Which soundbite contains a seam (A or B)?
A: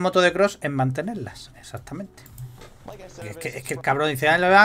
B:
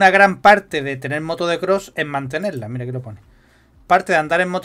A